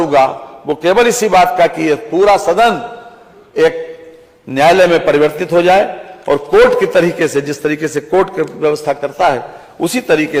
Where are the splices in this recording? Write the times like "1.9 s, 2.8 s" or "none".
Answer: none